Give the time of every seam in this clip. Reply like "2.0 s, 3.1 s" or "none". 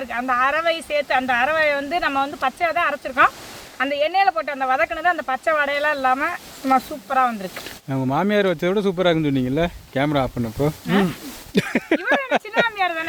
none